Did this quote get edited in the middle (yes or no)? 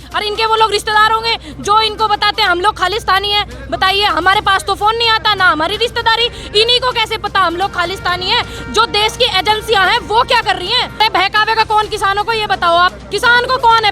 yes